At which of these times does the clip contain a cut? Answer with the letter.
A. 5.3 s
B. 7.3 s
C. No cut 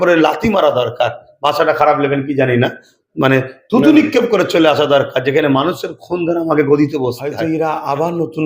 B